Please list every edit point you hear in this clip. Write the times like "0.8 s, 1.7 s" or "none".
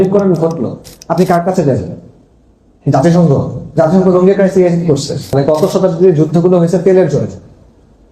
5.3 s